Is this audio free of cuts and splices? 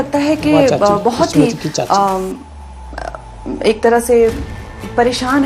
yes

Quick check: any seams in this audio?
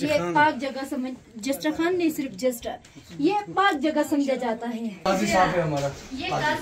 yes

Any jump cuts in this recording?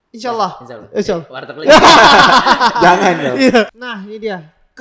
yes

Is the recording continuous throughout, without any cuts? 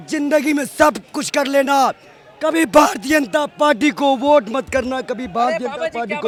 yes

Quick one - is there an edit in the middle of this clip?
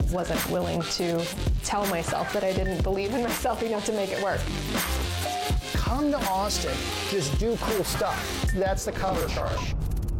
no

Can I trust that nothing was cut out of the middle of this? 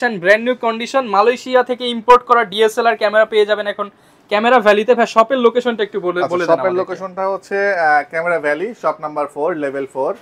yes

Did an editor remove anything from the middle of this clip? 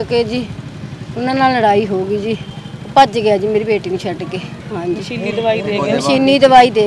yes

